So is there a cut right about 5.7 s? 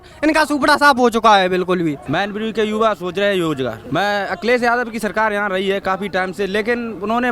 no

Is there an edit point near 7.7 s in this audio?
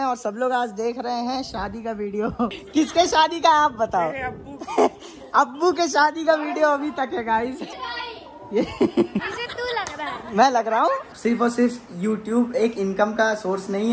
yes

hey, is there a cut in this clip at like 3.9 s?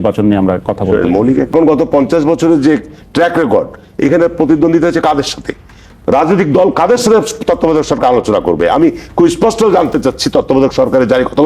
no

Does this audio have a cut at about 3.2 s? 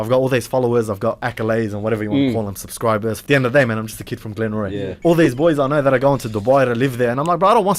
yes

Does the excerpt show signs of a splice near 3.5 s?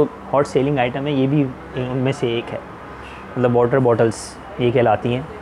no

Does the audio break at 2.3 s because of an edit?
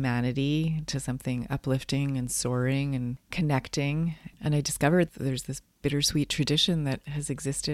no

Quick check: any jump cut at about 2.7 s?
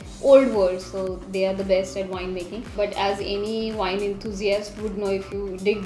yes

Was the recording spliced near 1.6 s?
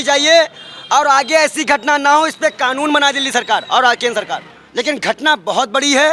no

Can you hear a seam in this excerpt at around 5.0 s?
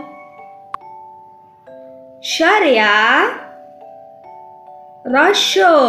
yes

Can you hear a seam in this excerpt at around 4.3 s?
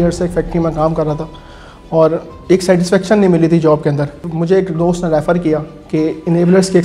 yes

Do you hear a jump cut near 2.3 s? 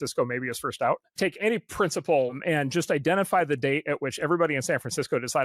yes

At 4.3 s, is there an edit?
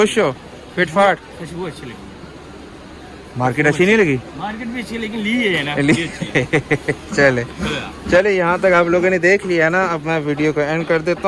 no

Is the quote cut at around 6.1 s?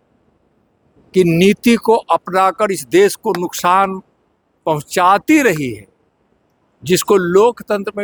no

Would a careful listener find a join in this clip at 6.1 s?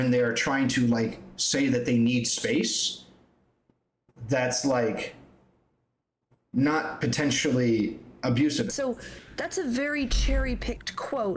no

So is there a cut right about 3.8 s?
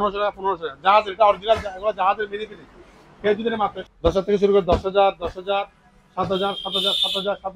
yes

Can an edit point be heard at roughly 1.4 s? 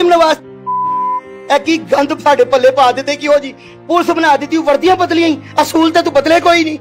yes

